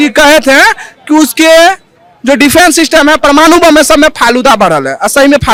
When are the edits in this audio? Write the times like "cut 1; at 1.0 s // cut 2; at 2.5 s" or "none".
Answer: none